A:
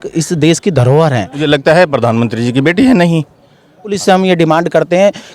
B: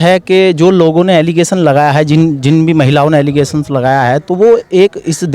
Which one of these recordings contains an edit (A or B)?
A